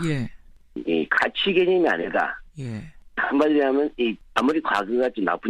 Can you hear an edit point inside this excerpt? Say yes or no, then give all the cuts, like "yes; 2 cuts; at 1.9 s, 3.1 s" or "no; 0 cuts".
yes; 1 cut; at 3.4 s